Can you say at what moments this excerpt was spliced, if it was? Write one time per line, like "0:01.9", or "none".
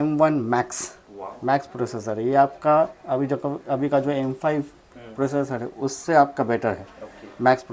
none